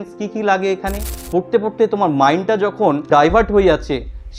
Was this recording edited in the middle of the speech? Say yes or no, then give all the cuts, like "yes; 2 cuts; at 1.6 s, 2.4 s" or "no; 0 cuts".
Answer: yes; 2 cuts; at 1.2 s, 3.1 s